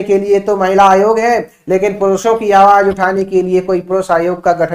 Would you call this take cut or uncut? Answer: uncut